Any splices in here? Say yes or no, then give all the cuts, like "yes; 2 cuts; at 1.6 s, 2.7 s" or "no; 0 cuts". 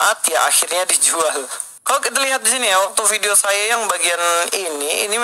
yes; 1 cut; at 1.6 s